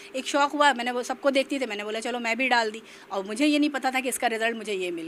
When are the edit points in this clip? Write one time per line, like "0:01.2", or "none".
none